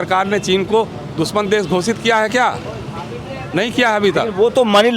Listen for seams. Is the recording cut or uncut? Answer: uncut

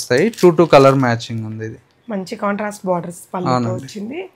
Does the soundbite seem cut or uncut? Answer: uncut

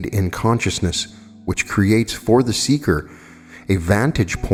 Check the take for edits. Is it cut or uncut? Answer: uncut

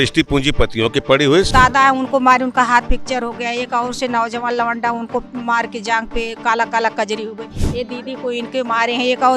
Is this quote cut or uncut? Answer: cut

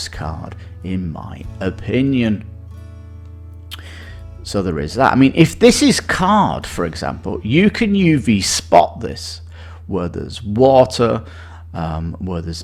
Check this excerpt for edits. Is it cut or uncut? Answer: uncut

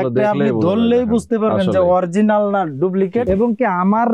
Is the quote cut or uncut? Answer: cut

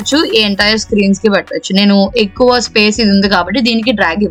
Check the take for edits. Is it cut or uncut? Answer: uncut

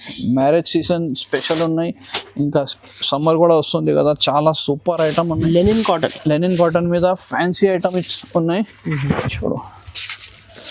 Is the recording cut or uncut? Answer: uncut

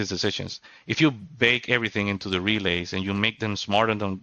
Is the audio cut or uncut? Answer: uncut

